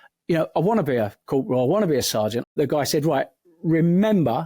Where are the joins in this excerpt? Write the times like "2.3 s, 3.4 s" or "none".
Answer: 2.5 s